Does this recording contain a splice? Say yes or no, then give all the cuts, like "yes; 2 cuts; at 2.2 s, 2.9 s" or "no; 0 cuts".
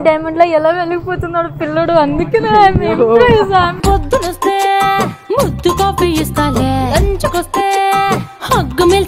no; 0 cuts